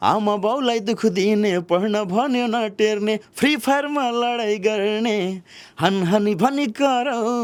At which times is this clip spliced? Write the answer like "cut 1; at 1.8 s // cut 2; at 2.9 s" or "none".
none

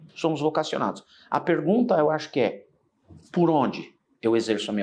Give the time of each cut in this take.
none

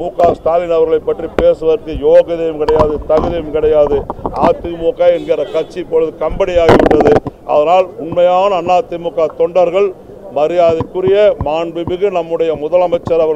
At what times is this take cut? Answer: none

